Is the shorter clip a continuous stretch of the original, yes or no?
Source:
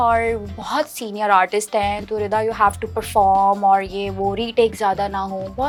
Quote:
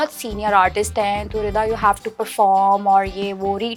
yes